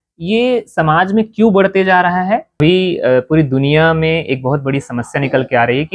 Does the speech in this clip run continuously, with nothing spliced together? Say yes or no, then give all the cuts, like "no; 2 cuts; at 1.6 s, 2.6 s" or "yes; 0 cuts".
no; 1 cut; at 2.6 s